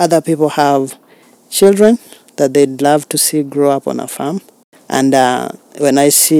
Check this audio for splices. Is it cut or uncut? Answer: uncut